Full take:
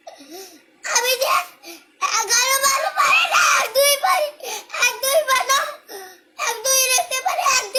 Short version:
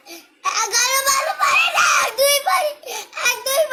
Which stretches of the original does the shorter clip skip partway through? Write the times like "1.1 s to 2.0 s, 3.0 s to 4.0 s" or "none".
none